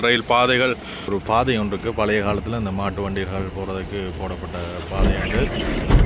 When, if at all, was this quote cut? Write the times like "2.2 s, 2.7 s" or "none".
1.1 s